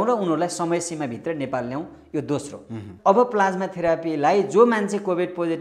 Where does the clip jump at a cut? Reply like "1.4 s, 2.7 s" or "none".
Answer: 2.9 s